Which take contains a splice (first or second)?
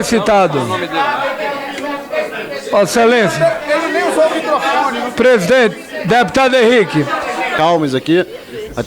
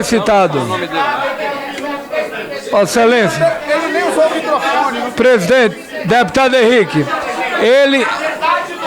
first